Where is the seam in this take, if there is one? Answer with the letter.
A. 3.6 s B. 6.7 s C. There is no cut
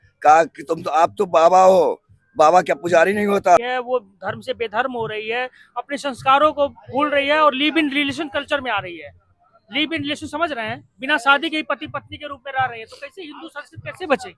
A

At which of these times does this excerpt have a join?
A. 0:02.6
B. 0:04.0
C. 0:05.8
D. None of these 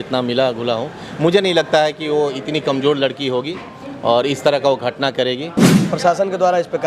C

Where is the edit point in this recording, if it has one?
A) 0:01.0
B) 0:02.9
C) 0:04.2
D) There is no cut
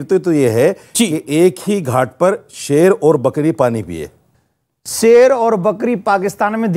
C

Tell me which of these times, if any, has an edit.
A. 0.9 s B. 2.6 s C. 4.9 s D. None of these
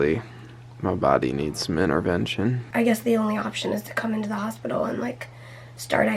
B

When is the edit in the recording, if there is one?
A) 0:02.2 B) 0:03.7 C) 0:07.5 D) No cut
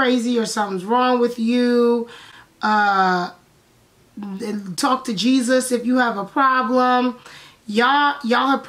D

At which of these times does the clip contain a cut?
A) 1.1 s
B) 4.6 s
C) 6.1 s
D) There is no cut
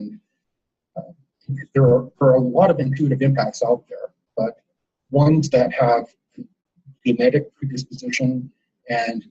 A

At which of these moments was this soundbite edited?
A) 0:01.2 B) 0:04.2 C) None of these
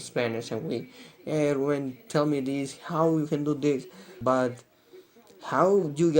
B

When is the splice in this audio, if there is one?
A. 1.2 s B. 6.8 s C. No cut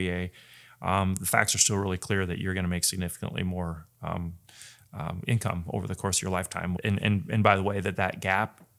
B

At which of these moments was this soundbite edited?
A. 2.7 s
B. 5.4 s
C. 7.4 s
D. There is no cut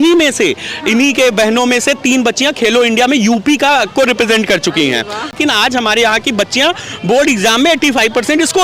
B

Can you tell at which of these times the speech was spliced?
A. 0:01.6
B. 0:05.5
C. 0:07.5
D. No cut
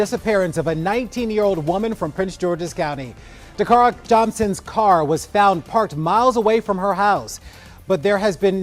D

